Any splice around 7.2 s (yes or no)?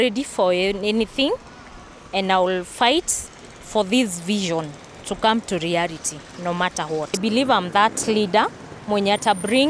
yes